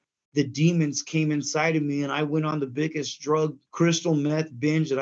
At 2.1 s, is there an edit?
no; 1 cut; at 3.6 s

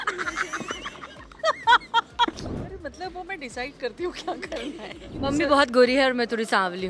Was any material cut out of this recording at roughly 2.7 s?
yes; 2 cuts; at 2.7 s, 5.2 s

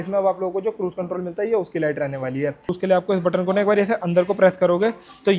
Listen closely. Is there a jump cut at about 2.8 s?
yes; 1 cut; at 2.8 s

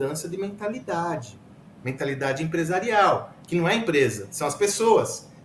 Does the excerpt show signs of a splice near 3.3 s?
no; 0 cuts

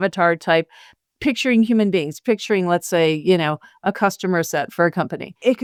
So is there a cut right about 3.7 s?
no; 0 cuts

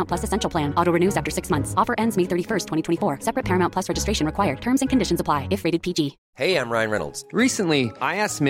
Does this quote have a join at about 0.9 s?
no; 1 cut; at 6.2 s

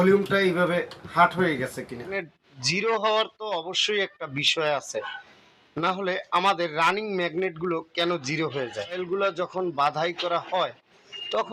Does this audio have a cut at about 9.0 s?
yes; 2 cuts; at 2.1 s, 9.0 s

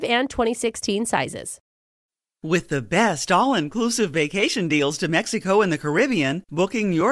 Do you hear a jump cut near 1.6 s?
yes; 1 cut; at 1.6 s

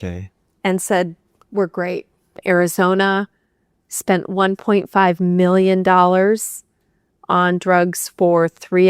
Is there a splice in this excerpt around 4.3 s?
no; 1 cut; at 2.4 s

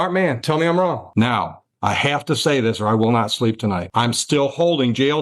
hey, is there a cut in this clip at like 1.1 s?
yes; 2 cuts; at 1.1 s, 3.8 s

